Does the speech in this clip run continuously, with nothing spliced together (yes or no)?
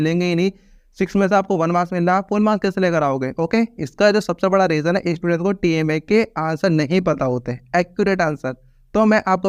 yes